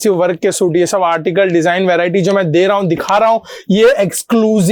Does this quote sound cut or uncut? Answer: uncut